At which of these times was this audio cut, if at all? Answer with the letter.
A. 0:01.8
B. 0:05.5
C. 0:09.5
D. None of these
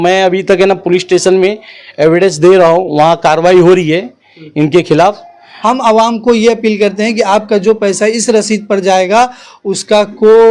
B